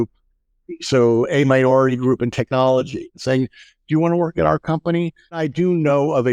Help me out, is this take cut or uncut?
cut